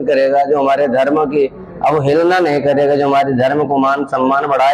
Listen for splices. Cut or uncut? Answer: uncut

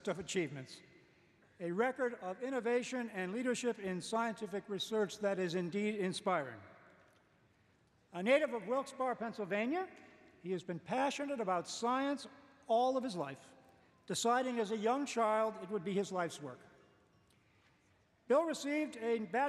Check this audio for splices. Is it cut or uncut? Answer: cut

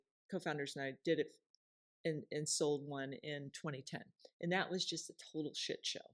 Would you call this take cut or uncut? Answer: uncut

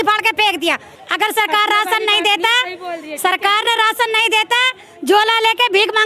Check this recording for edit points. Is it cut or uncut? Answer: cut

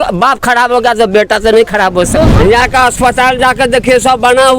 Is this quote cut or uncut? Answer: cut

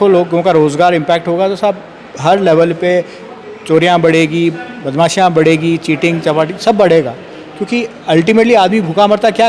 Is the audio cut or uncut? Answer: uncut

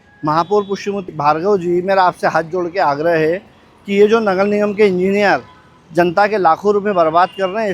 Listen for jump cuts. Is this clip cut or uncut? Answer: cut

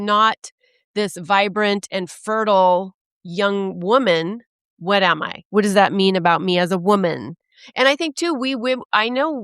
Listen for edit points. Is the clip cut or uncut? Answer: cut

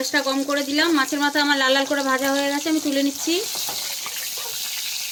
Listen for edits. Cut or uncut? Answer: uncut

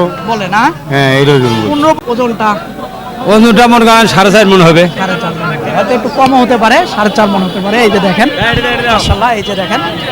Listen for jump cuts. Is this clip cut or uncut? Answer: cut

